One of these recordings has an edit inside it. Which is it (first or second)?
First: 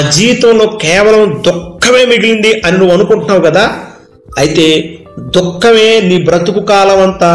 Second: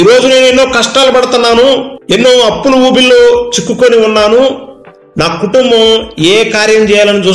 second